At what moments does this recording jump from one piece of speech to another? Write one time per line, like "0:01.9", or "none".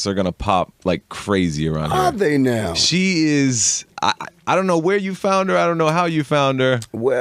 0:03.6